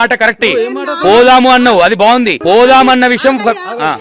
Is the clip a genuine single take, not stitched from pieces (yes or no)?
no